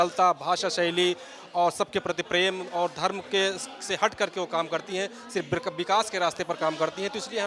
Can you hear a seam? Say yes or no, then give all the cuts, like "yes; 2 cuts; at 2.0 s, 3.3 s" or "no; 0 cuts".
no; 0 cuts